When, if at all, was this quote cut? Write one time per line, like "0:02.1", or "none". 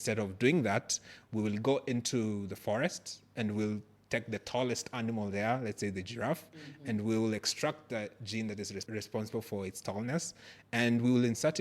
none